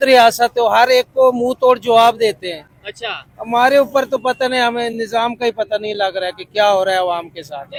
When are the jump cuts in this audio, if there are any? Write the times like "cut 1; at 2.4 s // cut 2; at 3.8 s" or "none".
none